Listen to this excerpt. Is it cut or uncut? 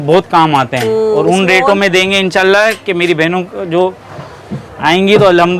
uncut